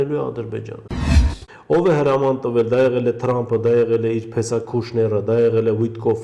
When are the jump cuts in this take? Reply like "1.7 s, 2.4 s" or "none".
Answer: 1.0 s